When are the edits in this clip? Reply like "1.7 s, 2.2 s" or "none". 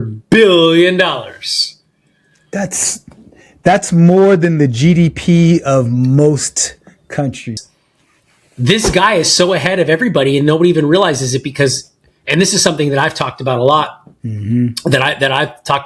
7.7 s